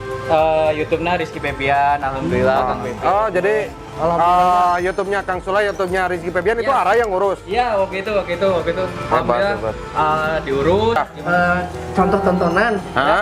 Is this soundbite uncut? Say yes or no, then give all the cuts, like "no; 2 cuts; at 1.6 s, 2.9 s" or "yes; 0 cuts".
no; 1 cut; at 11.0 s